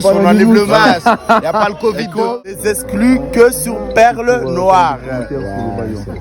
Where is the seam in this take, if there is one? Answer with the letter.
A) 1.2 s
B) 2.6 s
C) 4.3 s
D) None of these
B